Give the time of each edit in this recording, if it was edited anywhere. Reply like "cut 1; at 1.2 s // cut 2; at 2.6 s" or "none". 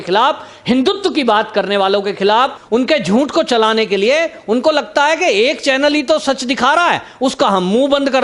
cut 1; at 2.6 s

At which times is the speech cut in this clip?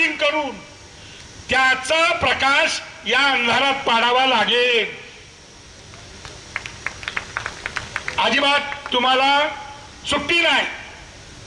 none

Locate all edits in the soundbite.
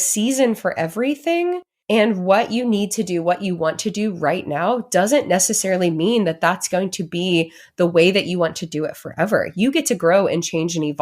cut 1; at 1.7 s

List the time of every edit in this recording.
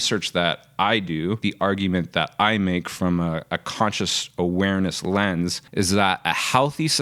cut 1; at 5.6 s

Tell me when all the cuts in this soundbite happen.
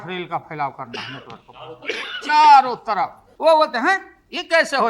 cut 1; at 3.2 s

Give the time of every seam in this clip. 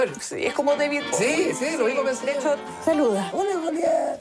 cut 1; at 2.6 s

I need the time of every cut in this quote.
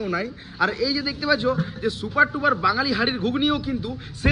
none

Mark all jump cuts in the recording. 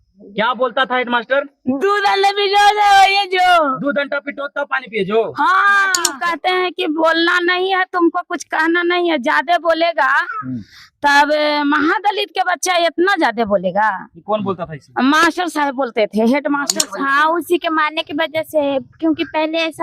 cut 1; at 6.1 s // cut 2; at 16.8 s

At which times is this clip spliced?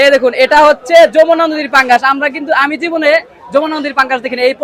none

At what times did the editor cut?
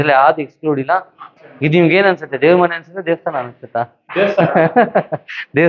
cut 1; at 1.3 s

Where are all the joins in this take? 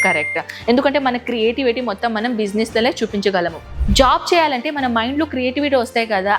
cut 1; at 3.8 s

